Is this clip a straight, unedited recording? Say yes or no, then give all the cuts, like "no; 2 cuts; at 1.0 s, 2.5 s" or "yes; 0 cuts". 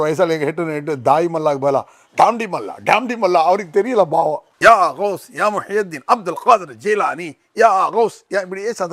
yes; 0 cuts